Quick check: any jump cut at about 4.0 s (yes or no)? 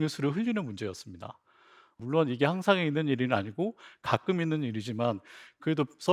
no